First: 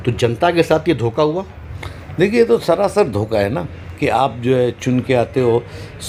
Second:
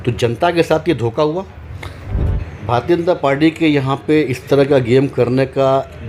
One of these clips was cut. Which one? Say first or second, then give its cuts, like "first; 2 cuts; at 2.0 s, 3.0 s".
second; 1 cut; at 2.0 s